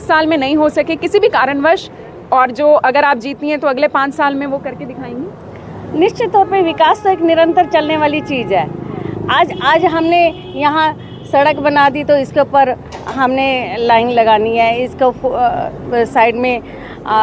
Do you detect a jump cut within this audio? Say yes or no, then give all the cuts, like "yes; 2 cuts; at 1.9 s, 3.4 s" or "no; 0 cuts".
no; 0 cuts